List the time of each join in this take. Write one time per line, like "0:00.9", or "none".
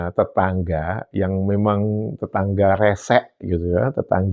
none